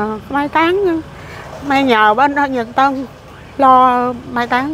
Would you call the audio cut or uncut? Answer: uncut